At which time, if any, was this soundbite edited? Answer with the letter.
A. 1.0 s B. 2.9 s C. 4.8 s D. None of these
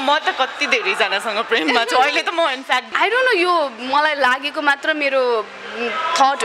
B